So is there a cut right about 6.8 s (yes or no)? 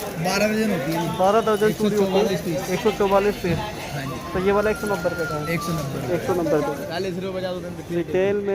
yes